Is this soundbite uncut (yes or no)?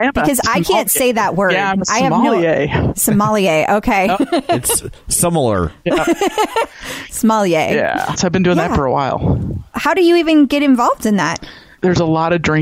no